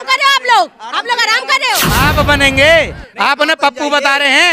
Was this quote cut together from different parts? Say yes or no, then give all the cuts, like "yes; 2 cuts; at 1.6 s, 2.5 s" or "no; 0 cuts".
yes; 1 cut; at 1.9 s